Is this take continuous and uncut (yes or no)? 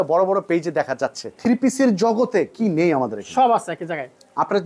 no